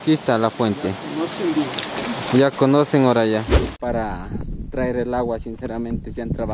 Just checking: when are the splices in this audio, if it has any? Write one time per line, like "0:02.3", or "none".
0:03.8